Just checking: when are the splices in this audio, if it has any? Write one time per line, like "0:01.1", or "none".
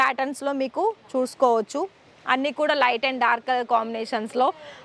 none